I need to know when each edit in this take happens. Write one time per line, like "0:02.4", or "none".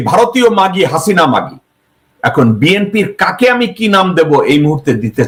none